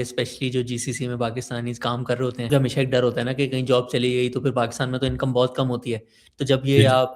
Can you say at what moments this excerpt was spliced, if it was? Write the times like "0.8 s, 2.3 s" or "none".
2.5 s